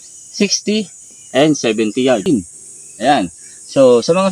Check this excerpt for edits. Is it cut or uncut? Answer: cut